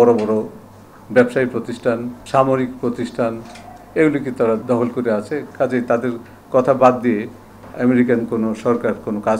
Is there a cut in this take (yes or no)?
yes